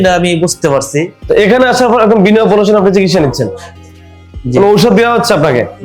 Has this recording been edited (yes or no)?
yes